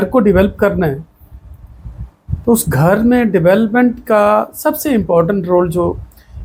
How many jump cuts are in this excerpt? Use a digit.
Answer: 0